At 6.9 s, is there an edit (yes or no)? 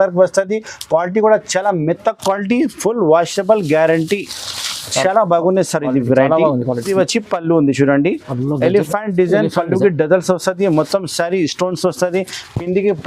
yes